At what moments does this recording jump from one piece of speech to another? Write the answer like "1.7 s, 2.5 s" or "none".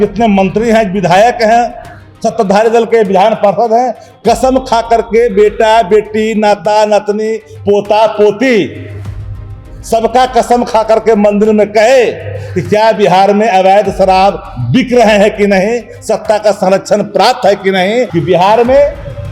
18.1 s